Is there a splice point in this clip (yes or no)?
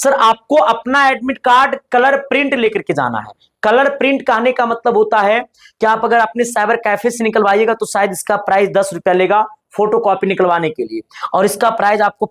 no